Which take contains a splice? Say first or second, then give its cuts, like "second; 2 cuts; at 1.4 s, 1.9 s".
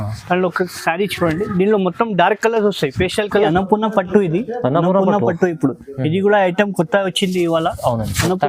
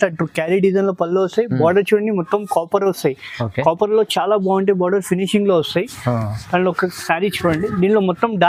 first; 1 cut; at 3.5 s